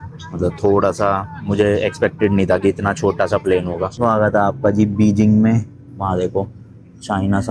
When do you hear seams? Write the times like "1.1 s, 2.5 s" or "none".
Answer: 3.9 s